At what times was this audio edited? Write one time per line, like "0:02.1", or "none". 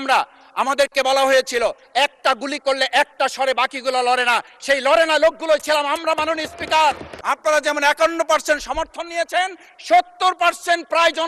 0:07.1